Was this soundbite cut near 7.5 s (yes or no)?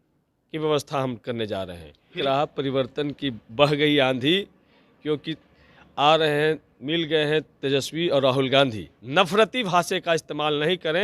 no